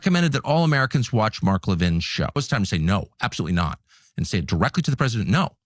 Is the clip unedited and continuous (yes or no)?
no